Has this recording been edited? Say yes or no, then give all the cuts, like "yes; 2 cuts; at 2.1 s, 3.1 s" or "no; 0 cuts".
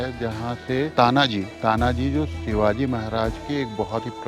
yes; 1 cut; at 0.9 s